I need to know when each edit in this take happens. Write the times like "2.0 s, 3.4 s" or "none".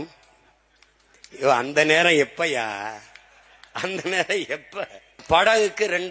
5.2 s